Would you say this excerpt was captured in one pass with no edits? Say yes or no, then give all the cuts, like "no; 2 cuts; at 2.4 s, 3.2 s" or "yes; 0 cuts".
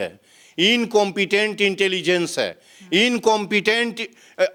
yes; 0 cuts